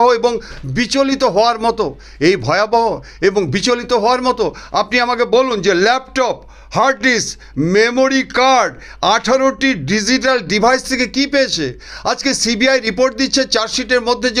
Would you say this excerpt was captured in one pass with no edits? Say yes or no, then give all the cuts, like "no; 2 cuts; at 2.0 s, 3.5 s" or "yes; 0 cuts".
yes; 0 cuts